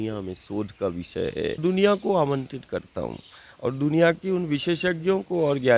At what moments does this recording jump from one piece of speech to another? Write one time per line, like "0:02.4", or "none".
0:01.6